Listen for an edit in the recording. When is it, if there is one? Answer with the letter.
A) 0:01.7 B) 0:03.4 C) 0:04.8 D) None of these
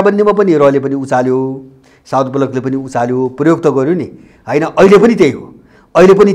D